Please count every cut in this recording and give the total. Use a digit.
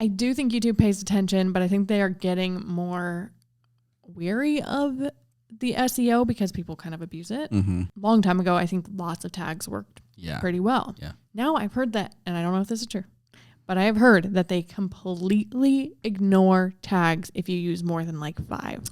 1